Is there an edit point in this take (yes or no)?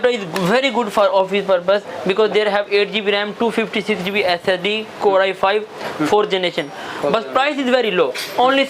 no